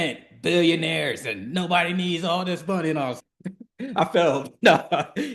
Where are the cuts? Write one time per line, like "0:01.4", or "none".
none

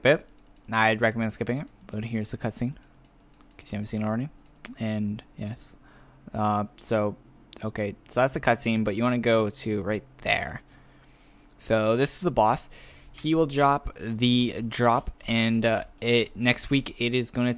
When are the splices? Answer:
0:03.3

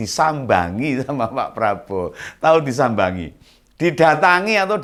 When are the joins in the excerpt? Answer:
none

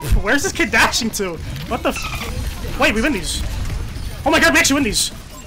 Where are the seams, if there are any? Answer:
none

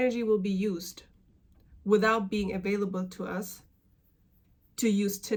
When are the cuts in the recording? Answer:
none

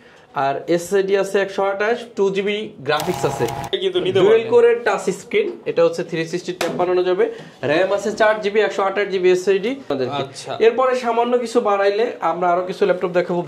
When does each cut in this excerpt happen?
0:03.7
0:09.9

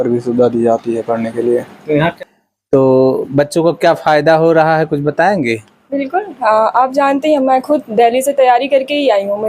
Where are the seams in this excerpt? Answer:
0:02.1

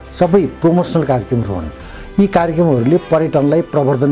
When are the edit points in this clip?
none

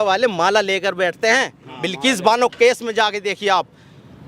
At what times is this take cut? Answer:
none

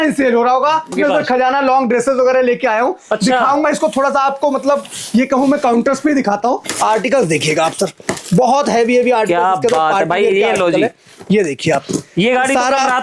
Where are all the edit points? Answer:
0:00.9
0:06.7

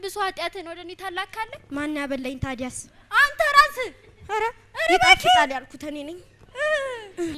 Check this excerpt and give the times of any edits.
none

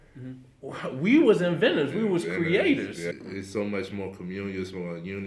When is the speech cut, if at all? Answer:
0:03.0

